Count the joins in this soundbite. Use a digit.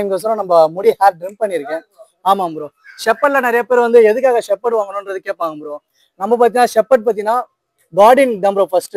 0